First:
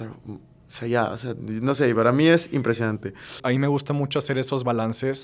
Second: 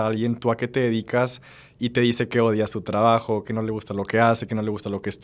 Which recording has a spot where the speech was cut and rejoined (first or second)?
first